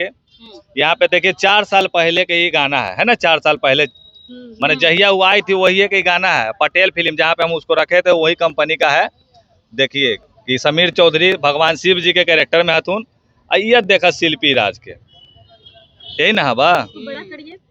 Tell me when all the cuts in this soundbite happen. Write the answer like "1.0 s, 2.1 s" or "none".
none